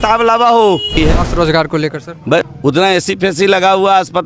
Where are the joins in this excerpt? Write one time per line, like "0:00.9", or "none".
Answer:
0:00.9
0:02.5